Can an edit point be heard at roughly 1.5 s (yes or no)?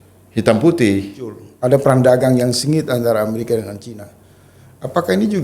yes